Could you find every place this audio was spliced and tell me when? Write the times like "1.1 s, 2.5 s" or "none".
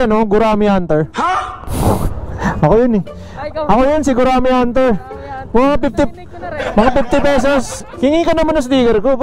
1.1 s, 7.9 s